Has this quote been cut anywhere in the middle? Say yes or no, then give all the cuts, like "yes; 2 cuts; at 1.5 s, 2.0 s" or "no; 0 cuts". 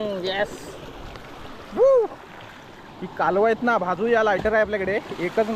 no; 0 cuts